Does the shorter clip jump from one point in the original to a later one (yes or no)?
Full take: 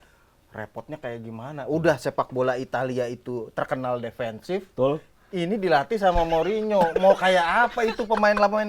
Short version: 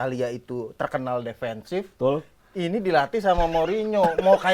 no